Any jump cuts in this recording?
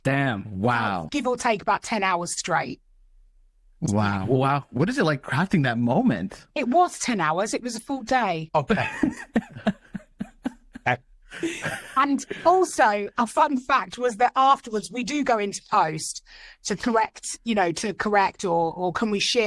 yes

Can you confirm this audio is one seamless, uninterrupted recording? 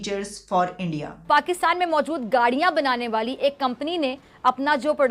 no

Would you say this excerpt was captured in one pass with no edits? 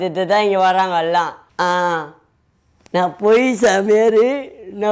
no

